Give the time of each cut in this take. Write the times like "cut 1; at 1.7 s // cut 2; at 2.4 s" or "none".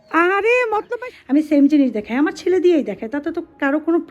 cut 1; at 0.9 s